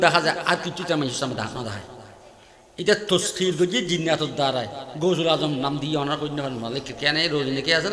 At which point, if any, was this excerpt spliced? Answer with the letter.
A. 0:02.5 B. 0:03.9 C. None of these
C